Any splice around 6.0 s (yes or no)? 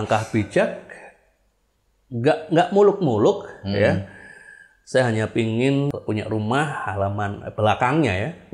yes